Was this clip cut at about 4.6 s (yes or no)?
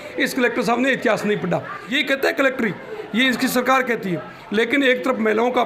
no